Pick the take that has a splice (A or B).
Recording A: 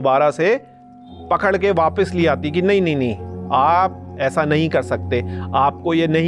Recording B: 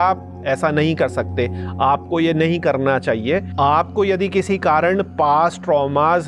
B